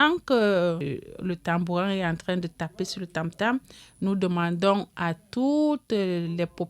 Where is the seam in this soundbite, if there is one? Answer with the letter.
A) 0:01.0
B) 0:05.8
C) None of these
A